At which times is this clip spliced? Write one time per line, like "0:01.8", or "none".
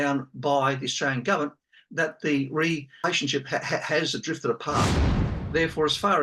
0:03.1
0:05.2